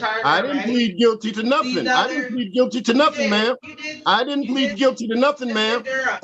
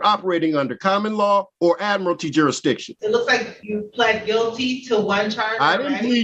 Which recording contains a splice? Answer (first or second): second